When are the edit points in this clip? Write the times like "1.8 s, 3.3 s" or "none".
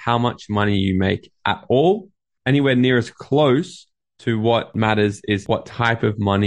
5.4 s